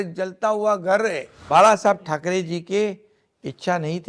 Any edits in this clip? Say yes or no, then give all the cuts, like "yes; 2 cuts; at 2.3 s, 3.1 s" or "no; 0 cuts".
yes; 1 cut; at 1.3 s